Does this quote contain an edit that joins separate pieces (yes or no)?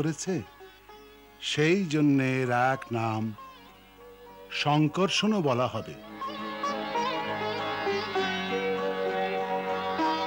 no